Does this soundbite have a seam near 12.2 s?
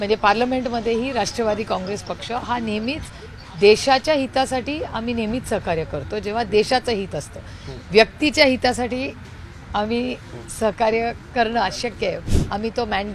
yes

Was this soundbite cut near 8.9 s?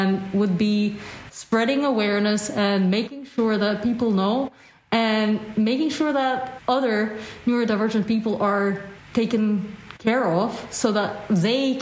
yes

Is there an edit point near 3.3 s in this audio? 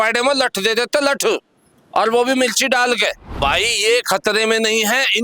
yes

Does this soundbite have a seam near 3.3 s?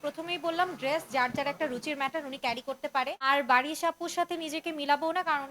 yes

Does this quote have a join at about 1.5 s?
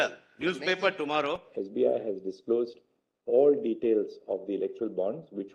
yes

